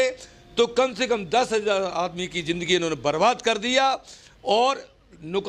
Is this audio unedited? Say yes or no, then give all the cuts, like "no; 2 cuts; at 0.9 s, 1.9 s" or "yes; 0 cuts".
yes; 0 cuts